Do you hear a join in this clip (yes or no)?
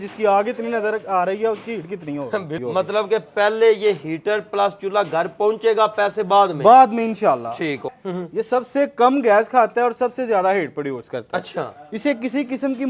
yes